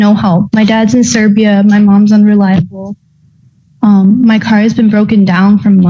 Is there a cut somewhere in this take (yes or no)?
no